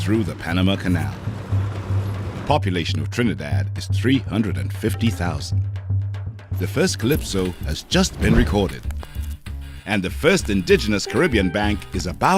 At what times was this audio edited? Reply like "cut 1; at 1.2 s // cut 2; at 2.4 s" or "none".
none